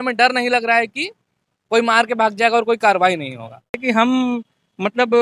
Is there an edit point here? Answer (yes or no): yes